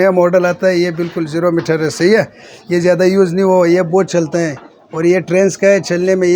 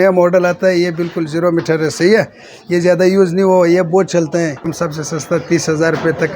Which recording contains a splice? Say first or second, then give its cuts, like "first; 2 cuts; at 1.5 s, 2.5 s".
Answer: second; 1 cut; at 4.7 s